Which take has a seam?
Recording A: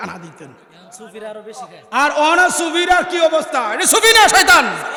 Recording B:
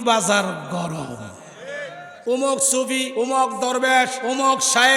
B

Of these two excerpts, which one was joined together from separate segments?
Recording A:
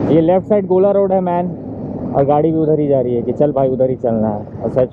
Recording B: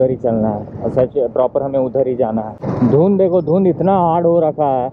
B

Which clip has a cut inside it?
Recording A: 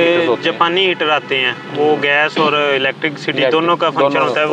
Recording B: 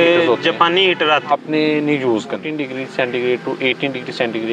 B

